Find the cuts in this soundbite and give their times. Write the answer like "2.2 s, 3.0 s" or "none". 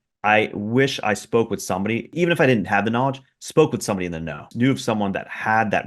2.1 s, 4.5 s